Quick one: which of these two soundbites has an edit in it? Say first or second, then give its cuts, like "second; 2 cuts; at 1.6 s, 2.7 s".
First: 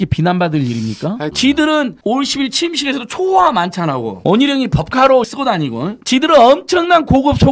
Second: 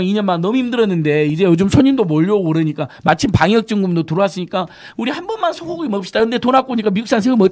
first; 3 cuts; at 1.3 s, 2.0 s, 5.3 s